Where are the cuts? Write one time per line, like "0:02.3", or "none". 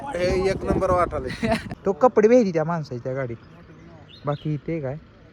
0:01.7